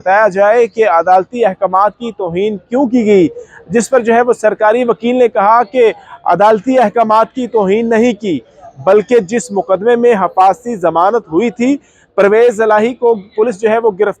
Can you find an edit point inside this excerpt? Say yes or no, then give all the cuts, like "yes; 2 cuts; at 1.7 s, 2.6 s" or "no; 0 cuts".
no; 0 cuts